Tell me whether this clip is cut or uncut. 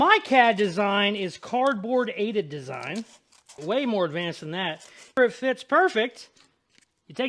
cut